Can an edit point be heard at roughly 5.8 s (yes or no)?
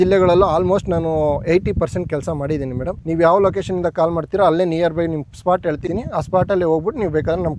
yes